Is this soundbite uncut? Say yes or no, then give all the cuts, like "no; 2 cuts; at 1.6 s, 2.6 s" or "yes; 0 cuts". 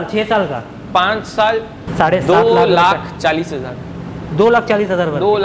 no; 1 cut; at 1.8 s